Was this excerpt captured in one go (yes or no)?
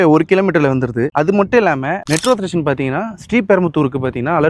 yes